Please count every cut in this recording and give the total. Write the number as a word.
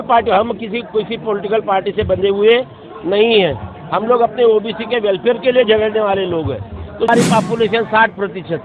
one